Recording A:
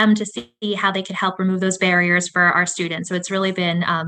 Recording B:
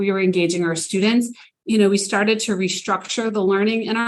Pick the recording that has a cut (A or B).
B